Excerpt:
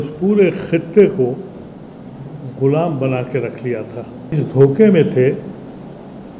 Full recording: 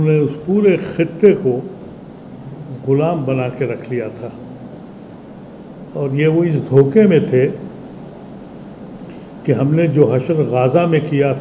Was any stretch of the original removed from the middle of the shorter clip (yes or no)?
yes